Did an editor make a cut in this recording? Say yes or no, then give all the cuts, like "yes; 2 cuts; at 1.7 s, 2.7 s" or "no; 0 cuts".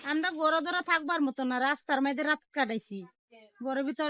no; 0 cuts